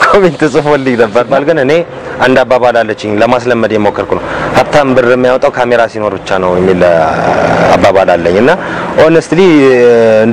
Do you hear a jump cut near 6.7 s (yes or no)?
no